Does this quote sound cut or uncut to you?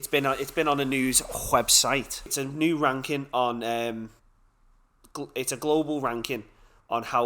cut